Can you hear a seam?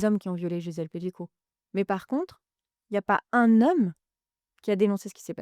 no; 0 cuts

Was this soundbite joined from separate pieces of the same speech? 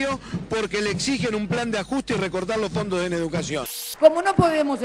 yes; 1 cut; at 3.8 s

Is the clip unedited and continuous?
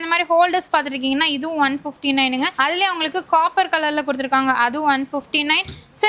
yes; 0 cuts

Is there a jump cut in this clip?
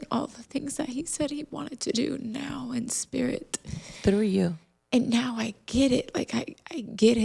no; 0 cuts

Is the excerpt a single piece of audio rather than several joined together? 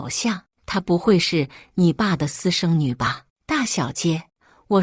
no; 1 cut; at 3.3 s

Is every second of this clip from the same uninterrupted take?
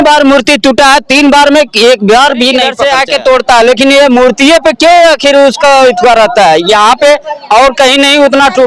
no; 1 cut; at 2.8 s

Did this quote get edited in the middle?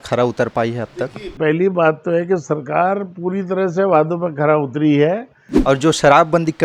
yes; 1 cut; at 5.5 s

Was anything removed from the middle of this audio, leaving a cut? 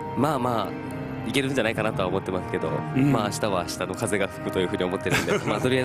yes; 1 cut; at 4.2 s

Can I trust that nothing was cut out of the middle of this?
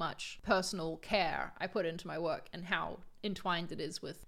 yes; 0 cuts

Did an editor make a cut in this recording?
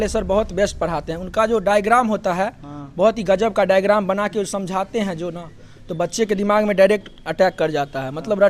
no; 0 cuts

